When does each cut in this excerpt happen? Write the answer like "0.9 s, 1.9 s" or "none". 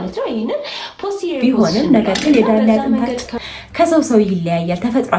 1.4 s